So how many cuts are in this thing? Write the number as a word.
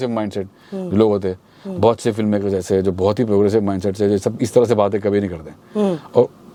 zero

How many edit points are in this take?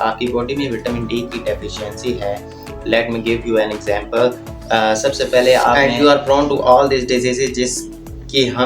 one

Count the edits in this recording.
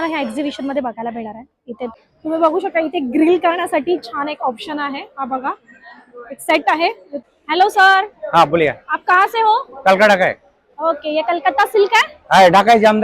two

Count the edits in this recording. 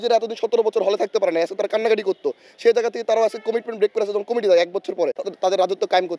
one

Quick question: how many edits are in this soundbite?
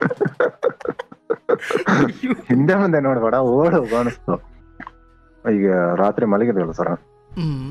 one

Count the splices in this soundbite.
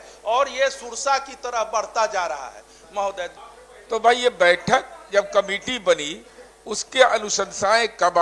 one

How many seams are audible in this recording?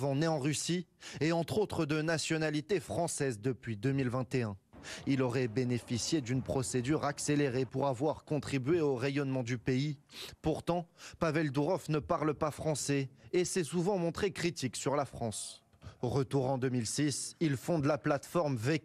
two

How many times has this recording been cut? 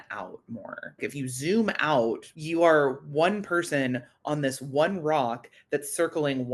two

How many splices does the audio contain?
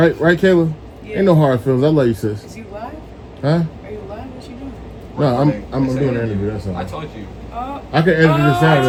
zero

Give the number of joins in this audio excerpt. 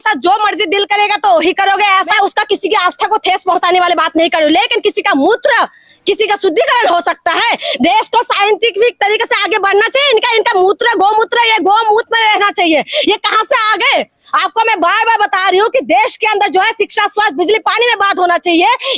one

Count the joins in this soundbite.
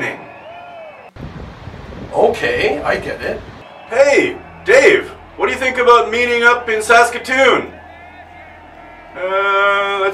zero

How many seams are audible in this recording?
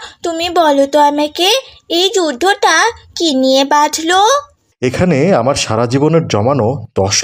one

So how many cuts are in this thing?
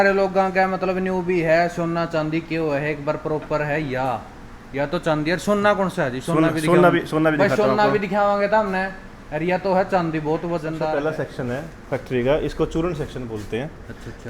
one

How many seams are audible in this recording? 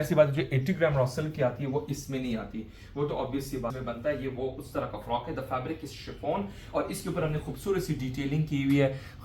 one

